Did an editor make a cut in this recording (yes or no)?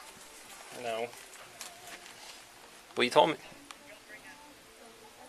no